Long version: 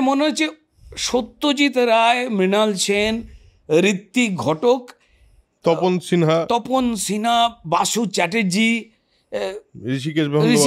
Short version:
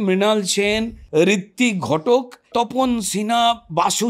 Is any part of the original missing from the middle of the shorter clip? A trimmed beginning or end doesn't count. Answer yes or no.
yes